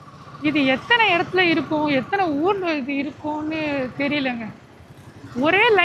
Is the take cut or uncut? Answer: uncut